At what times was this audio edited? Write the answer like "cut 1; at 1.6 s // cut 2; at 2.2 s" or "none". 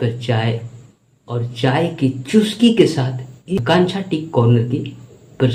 none